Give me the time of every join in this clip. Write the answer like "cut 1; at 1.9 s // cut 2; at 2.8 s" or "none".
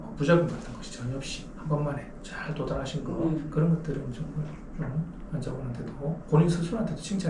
none